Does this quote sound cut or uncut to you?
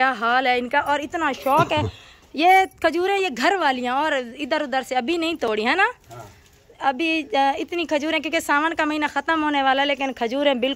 uncut